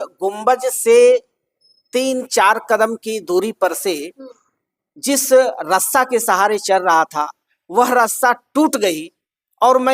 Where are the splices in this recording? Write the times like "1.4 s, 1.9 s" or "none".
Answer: none